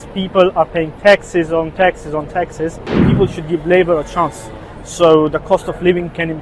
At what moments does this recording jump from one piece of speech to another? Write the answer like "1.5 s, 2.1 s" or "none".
3.1 s